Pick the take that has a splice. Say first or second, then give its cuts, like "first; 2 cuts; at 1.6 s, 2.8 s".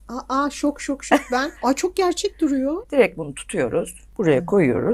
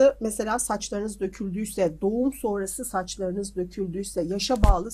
first; 3 cuts; at 1.5 s, 2.8 s, 4.0 s